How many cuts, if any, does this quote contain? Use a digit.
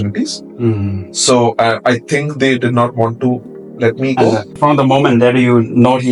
1